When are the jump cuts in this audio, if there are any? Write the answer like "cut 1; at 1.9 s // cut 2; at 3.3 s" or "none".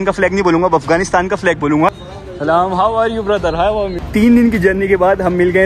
cut 1; at 1.9 s // cut 2; at 4.0 s